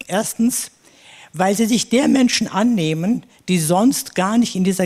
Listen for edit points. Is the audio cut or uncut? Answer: uncut